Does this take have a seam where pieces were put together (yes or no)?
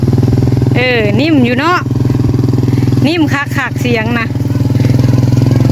no